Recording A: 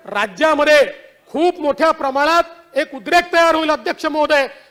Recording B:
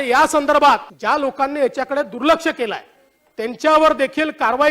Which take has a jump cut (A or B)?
B